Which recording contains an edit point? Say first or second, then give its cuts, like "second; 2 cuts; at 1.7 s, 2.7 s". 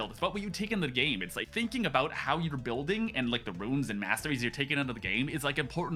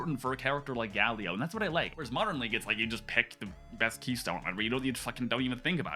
second; 1 cut; at 1.9 s